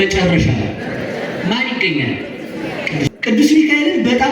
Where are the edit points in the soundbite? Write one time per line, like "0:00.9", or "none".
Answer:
0:03.1